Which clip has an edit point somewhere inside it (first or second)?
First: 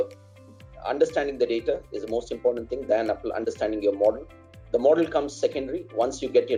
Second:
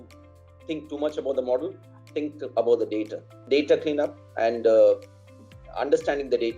second